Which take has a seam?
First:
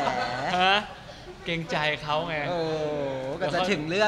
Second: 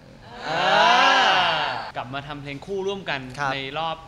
second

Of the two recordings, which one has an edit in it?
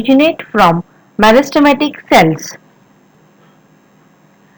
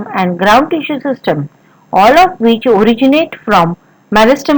first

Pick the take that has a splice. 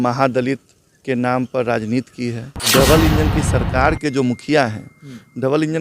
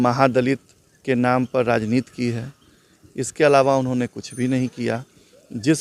first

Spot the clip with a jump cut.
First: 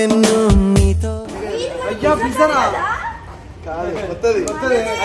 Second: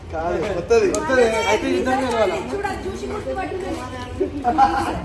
first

